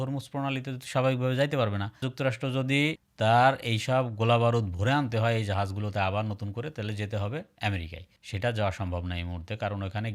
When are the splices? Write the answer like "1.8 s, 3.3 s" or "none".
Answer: none